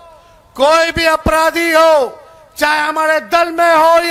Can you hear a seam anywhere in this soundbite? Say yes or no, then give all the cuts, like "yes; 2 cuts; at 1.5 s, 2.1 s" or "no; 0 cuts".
no; 0 cuts